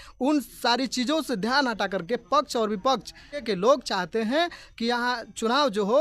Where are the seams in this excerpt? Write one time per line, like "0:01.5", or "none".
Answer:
0:03.4

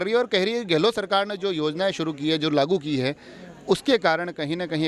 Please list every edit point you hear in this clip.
none

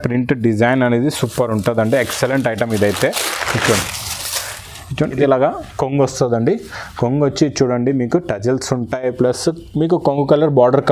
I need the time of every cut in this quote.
0:05.1

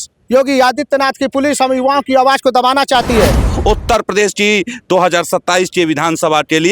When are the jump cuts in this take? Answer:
0:03.4

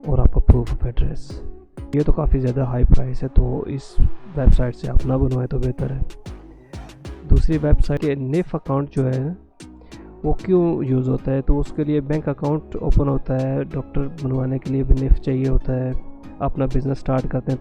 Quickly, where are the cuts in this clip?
0:01.9
0:08.0

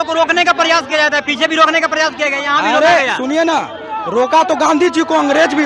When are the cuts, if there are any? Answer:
none

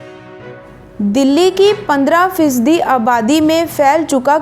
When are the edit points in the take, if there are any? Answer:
0:01.0

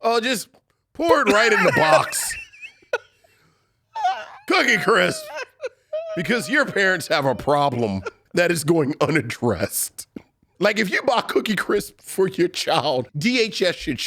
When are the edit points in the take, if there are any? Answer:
0:08.1
0:10.5
0:13.1

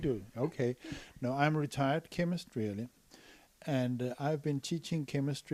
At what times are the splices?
none

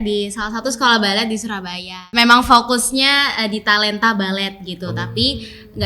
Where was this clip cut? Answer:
0:02.1

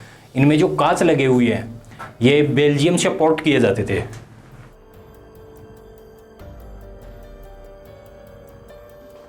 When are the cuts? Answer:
none

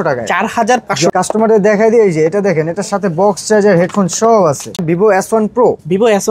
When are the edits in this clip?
0:01.1
0:04.8

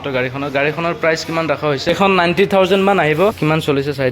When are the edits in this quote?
0:01.9
0:03.4

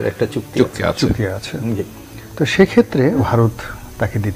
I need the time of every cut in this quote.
0:03.2

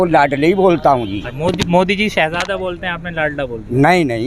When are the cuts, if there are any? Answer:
0:01.2

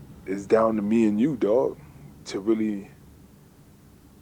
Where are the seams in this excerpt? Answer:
0:02.9

